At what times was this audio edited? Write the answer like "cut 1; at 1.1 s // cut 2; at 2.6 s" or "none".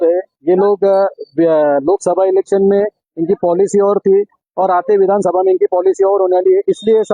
none